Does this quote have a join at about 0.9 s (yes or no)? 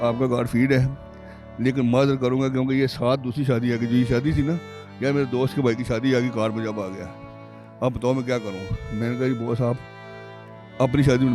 no